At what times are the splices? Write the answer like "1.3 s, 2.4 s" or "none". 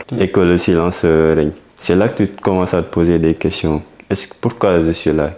none